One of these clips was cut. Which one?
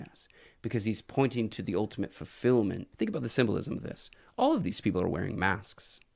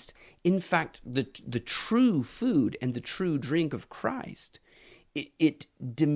first; 1 cut; at 2.8 s

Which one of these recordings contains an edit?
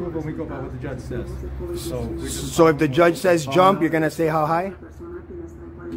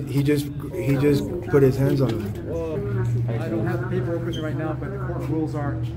second; 1 cut; at 2.8 s

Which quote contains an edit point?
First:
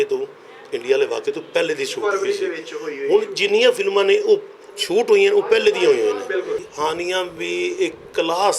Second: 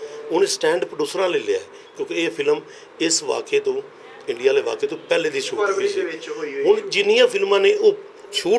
first; 1 cut; at 6.6 s

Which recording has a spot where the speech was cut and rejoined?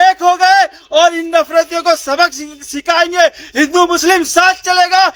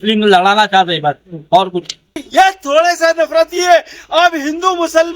second; 1 cut; at 2.2 s

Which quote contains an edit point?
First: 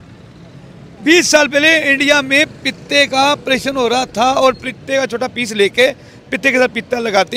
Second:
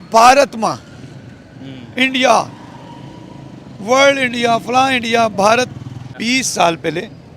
second; 1 cut; at 6.1 s

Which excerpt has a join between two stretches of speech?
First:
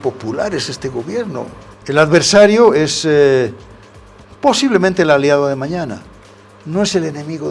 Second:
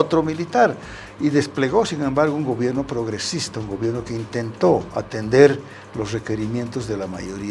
first; 1 cut; at 1.7 s

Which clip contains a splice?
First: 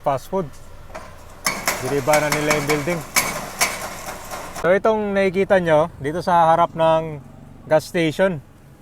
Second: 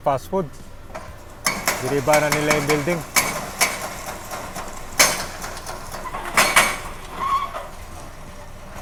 first; 1 cut; at 4.6 s

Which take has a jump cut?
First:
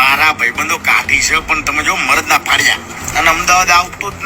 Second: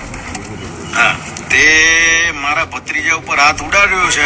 first; 1 cut; at 3.0 s

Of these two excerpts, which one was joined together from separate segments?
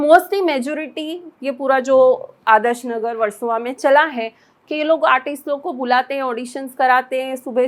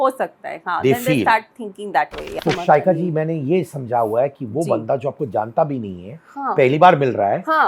second; 1 cut; at 2.4 s

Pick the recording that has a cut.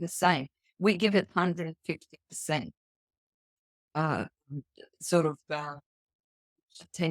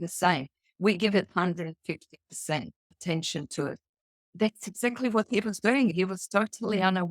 second; 3 cuts; at 2.8 s, 4.3 s, 5.9 s

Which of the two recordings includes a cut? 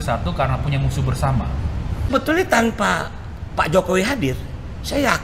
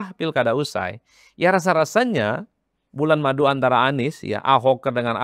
first; 1 cut; at 2.1 s

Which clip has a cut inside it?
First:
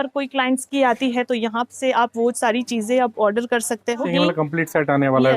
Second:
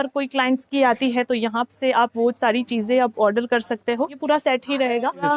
first; 1 cut; at 4.1 s

